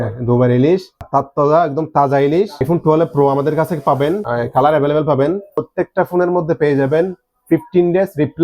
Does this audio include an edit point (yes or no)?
yes